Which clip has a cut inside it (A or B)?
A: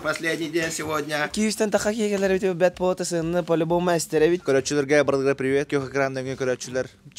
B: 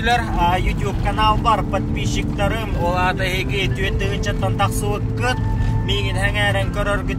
A